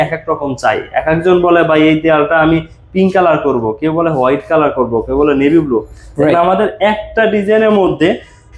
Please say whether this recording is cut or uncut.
uncut